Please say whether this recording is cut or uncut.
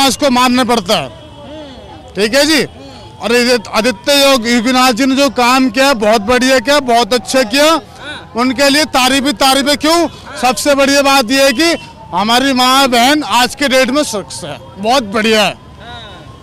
uncut